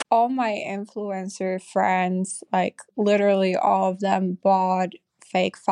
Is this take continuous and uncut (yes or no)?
yes